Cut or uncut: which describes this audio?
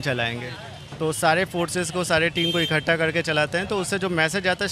uncut